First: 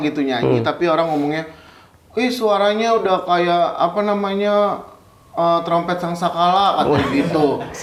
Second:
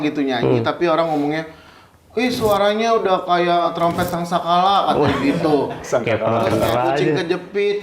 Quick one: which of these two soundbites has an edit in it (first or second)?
second